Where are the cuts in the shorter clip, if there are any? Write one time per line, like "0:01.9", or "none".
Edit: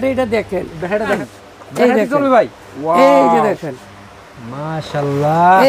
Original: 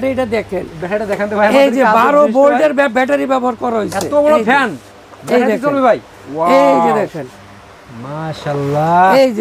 0:01.2